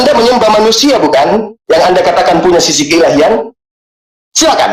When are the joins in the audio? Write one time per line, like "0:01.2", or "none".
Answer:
none